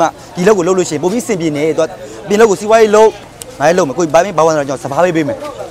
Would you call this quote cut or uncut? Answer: cut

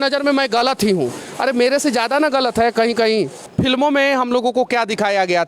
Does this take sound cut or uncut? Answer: cut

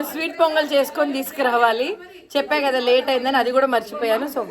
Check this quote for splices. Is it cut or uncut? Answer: uncut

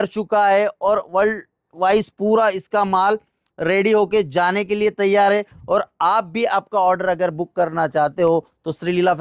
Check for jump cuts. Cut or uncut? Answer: uncut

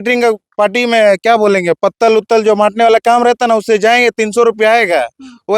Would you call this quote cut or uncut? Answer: uncut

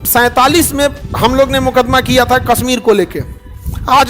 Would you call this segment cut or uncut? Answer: cut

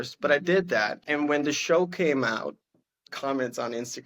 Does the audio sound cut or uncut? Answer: cut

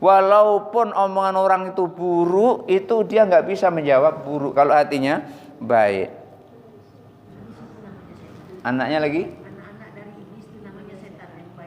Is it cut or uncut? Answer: cut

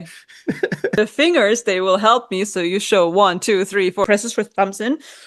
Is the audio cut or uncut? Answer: cut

